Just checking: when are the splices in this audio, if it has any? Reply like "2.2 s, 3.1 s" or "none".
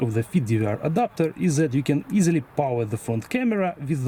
none